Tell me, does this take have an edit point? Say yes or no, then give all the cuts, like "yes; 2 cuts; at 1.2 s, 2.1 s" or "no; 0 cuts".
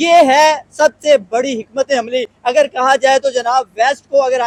no; 0 cuts